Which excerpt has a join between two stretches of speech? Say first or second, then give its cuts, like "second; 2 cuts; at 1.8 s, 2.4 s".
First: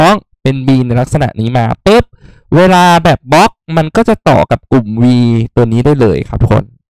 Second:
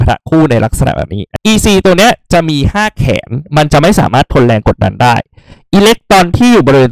second; 1 cut; at 1.2 s